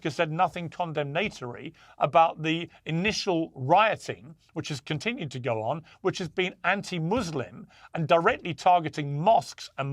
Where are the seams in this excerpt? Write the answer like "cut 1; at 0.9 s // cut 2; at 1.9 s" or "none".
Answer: none

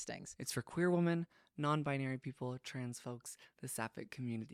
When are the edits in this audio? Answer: none

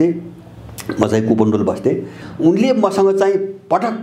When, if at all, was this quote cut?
cut 1; at 2.2 s

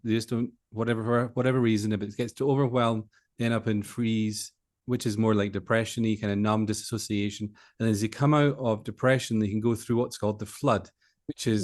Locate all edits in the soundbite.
cut 1; at 4.8 s

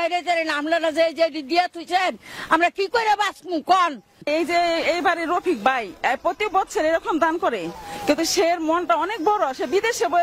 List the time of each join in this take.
cut 1; at 4.2 s

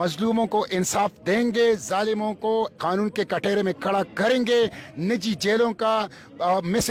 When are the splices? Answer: none

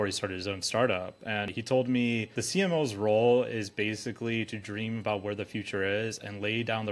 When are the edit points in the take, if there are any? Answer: cut 1; at 1.5 s // cut 2; at 2.3 s

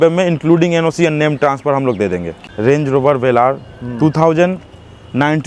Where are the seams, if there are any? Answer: cut 1; at 2.4 s

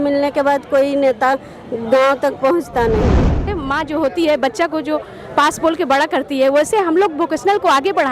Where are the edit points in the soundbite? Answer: cut 1; at 3.4 s

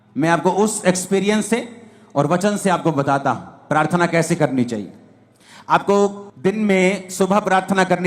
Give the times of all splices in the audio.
cut 1; at 6.3 s

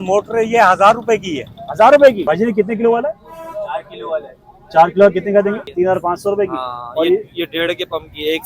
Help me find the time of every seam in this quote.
cut 1; at 2.2 s // cut 2; at 5.7 s

